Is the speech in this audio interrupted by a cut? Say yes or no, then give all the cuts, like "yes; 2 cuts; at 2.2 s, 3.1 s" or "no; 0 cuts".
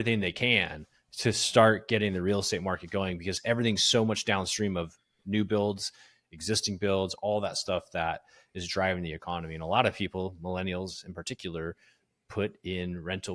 yes; 1 cut; at 3.3 s